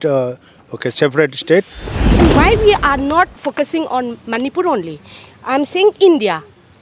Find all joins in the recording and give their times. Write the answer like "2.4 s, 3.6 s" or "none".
1.9 s